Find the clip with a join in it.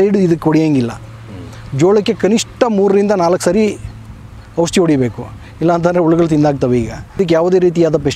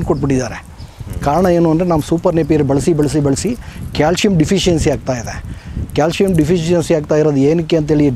first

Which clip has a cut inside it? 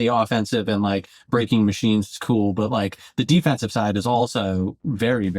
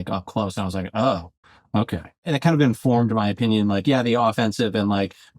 second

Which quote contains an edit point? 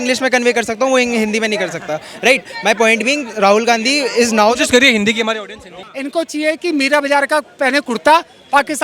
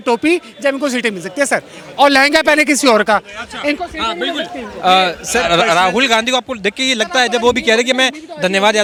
first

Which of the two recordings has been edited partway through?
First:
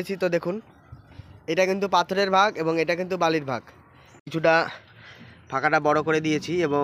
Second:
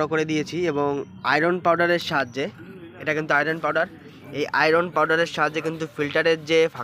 first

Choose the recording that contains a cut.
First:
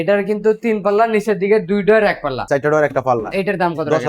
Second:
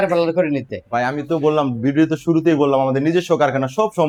first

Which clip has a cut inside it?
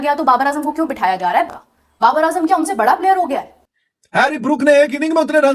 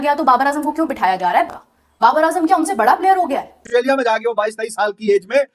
second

